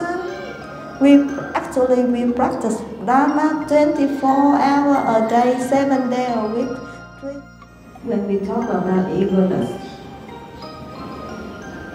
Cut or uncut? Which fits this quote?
cut